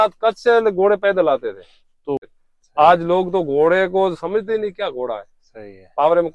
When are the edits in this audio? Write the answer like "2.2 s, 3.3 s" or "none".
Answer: 2.2 s